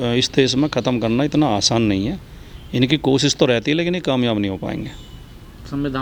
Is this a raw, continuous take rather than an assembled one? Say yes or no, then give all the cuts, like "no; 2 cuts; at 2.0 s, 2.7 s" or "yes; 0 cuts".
yes; 0 cuts